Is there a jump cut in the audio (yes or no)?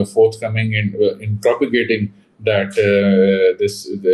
no